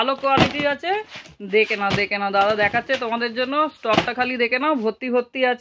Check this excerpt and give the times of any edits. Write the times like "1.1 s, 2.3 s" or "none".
none